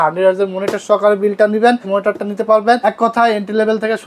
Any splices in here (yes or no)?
yes